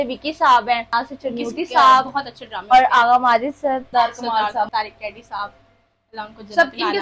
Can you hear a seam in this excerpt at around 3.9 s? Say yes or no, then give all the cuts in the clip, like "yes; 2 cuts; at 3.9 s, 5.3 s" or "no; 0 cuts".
yes; 3 cuts; at 0.9 s, 3.9 s, 4.7 s